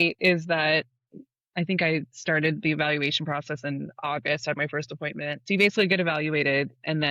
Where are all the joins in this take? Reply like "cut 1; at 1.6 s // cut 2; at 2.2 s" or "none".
cut 1; at 1.0 s // cut 2; at 5.4 s